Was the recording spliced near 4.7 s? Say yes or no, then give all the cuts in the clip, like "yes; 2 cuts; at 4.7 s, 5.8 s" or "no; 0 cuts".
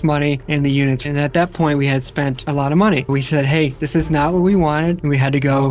no; 2 cuts; at 2.4 s, 3.1 s